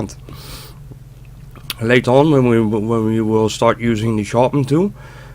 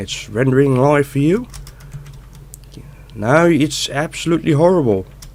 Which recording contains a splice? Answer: first; 1 cut; at 2.7 s

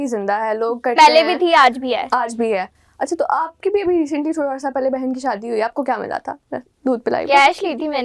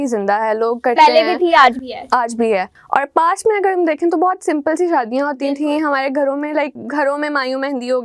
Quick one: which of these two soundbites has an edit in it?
second; 2 cuts; at 2.8 s, 6.8 s

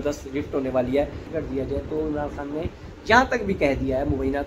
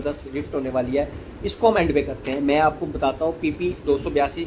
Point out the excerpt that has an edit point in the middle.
first; 1 cut; at 1.2 s

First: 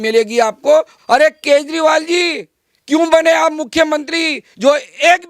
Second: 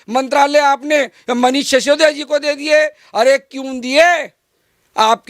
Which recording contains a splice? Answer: first; 1 cut; at 0.9 s

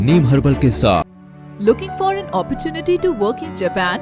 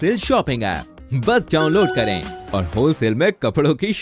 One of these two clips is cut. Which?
first; 1 cut; at 1.1 s

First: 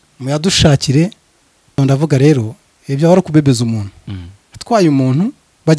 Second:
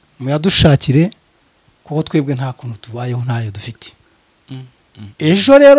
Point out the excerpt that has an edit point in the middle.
first; 1 cut; at 1.8 s

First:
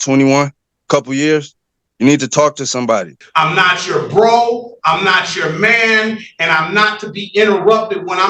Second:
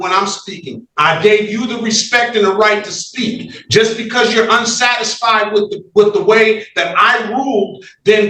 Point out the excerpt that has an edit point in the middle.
first; 1 cut; at 3.2 s

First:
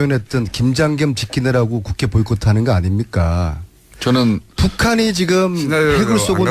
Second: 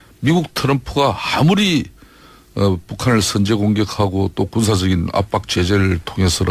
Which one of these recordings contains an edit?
second; 1 cut; at 4.4 s

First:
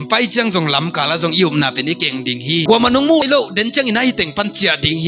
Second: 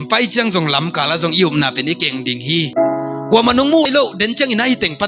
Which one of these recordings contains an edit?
first; 1 cut; at 2.6 s

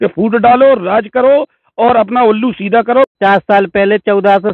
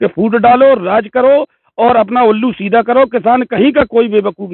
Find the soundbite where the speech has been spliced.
first; 1 cut; at 3.2 s

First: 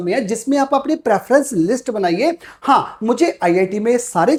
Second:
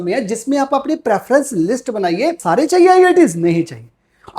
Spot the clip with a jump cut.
second; 1 cut; at 2.4 s

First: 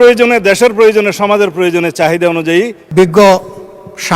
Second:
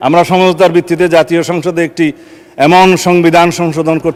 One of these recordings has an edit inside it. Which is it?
first; 1 cut; at 2.8 s

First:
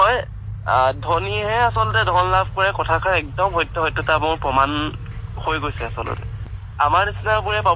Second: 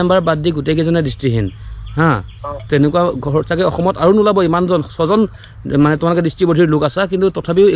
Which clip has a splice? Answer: first; 1 cut; at 6.5 s

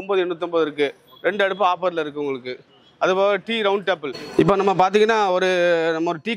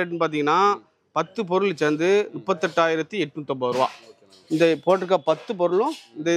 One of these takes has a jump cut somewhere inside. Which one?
first; 1 cut; at 4.2 s

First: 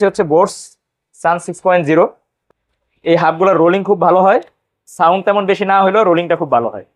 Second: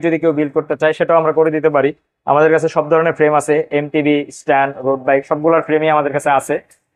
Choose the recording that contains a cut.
first; 1 cut; at 2.3 s

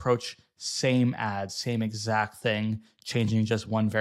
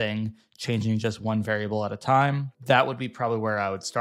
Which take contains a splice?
second; 1 cut; at 2.5 s

